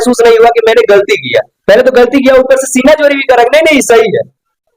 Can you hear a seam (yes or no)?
yes